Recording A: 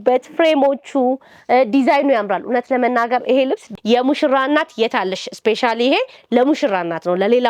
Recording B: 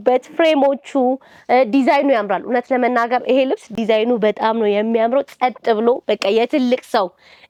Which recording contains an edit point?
A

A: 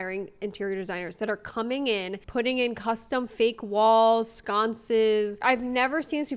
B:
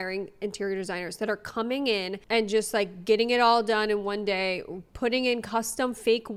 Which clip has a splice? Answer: A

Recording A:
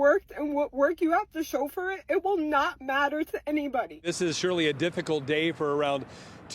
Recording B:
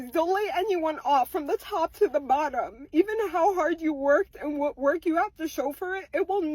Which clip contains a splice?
A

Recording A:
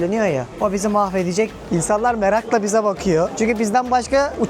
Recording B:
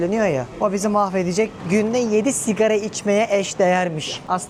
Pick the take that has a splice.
A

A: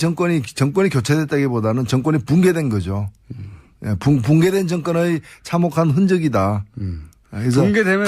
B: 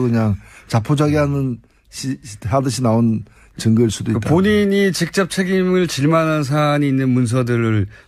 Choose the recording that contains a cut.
A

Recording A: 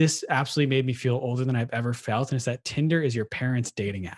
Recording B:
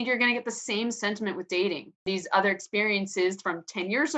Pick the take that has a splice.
B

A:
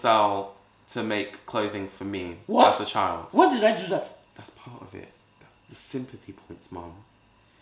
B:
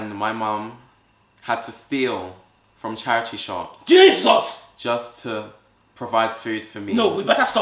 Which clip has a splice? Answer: A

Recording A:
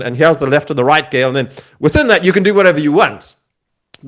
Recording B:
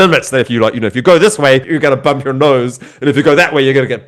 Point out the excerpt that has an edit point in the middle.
B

